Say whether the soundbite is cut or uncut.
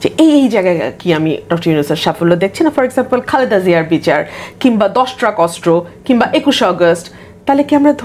uncut